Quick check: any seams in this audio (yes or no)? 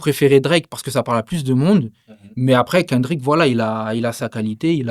no